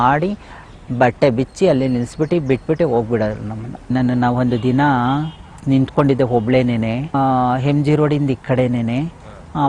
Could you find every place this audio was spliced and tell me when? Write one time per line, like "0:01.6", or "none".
0:03.9
0:05.5
0:07.1